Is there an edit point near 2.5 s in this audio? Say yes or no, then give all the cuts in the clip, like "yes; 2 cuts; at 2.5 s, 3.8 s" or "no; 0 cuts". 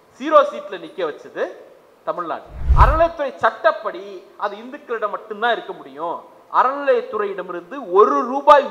yes; 1 cut; at 2.5 s